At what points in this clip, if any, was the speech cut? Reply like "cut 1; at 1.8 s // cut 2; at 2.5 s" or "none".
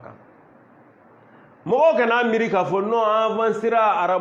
none